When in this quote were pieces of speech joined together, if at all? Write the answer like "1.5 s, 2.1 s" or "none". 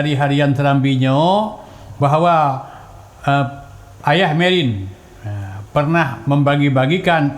none